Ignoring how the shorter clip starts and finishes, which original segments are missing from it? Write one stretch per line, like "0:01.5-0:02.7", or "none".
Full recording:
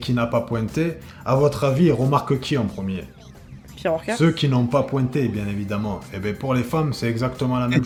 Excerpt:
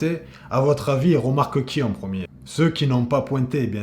0:03.2-0:04.1